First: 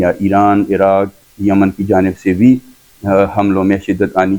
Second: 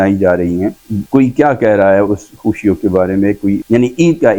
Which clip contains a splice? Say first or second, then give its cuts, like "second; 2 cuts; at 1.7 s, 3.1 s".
second; 2 cuts; at 0.9 s, 3.6 s